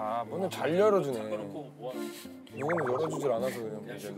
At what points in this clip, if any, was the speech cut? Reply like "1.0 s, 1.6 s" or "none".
none